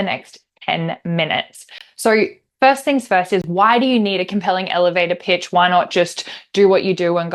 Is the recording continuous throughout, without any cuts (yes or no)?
yes